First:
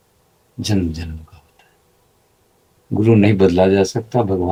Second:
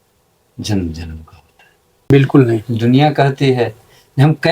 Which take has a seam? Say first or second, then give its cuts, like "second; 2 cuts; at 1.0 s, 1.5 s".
second; 1 cut; at 2.1 s